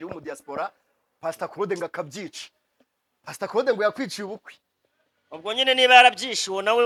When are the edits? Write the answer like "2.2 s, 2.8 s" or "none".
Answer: none